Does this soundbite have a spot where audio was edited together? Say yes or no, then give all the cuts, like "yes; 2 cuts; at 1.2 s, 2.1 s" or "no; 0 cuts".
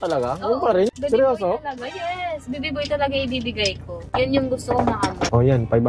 no; 0 cuts